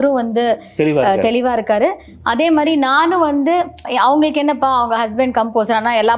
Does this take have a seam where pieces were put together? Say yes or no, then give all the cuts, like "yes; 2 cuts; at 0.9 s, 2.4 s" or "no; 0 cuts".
yes; 1 cut; at 3.9 s